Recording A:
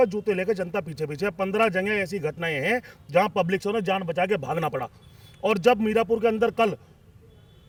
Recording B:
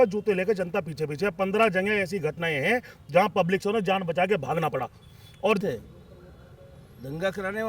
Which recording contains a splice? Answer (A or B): B